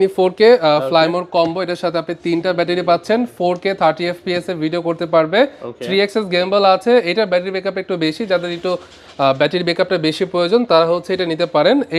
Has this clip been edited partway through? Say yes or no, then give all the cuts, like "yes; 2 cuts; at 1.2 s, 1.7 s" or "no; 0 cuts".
no; 0 cuts